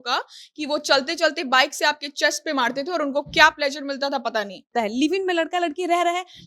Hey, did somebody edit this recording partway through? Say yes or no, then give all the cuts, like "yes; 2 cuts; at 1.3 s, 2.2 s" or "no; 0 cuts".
yes; 1 cut; at 4.7 s